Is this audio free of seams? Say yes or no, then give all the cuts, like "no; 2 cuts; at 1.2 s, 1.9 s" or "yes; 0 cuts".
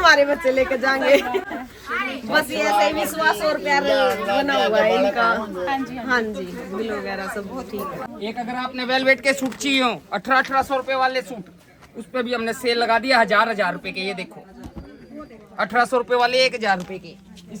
yes; 0 cuts